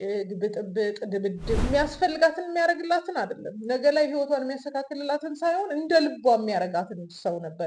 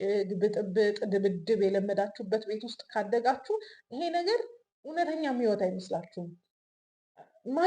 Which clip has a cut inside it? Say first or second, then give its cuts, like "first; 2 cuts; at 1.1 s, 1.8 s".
first; 1 cut; at 1.6 s